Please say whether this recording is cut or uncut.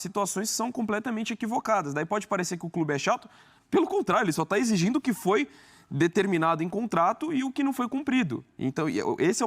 uncut